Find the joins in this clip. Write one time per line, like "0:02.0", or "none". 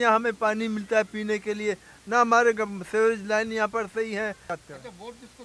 0:04.5